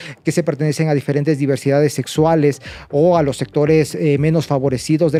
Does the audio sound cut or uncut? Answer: uncut